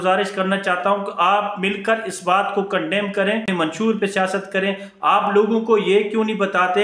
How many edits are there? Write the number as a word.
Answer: one